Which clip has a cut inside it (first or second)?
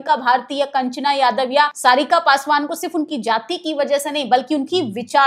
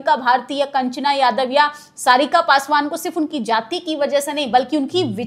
first